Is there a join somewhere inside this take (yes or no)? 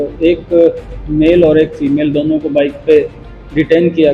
no